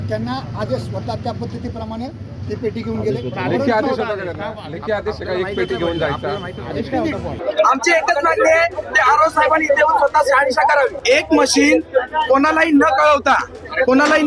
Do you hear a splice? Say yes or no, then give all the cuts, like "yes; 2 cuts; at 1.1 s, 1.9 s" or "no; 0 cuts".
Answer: yes; 2 cuts; at 7.3 s, 11.0 s